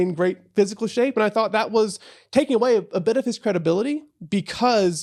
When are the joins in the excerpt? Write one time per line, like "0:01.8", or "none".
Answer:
none